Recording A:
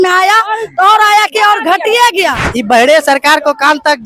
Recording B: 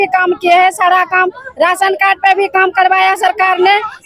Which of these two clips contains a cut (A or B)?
A